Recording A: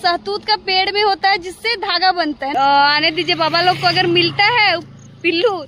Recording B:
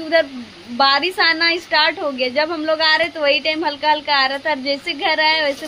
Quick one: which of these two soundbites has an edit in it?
A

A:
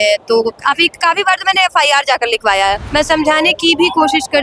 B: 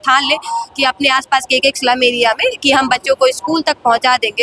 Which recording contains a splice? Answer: A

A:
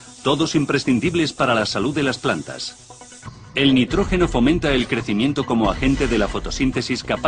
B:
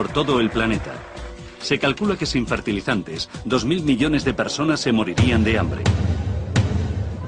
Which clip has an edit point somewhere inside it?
B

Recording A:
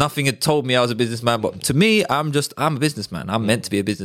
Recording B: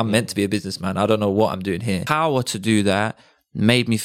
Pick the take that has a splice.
B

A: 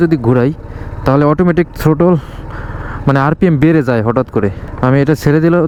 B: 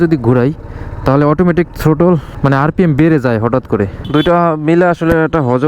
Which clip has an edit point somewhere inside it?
B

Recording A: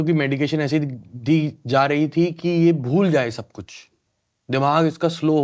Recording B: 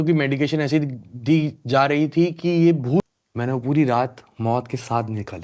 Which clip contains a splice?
B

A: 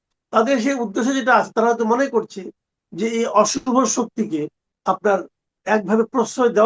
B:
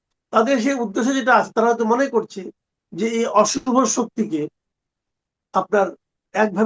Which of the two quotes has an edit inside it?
A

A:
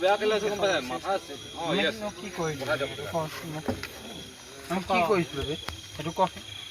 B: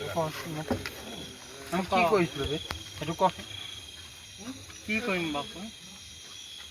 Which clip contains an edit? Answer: B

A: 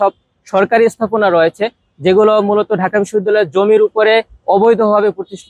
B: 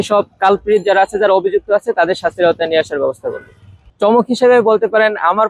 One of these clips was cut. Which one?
B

